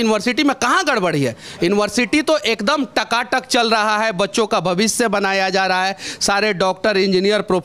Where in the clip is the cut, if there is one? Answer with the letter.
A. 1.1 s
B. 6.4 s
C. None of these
C